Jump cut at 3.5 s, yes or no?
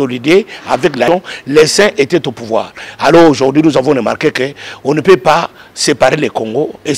no